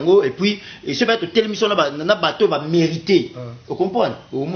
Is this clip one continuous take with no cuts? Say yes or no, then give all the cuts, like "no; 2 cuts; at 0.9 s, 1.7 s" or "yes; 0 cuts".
yes; 0 cuts